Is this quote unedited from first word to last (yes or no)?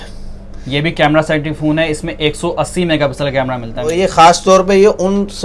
no